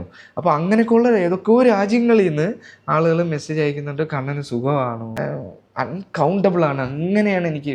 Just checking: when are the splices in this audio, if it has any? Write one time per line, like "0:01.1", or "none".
0:05.2